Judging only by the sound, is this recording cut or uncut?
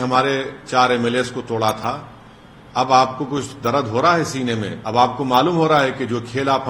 cut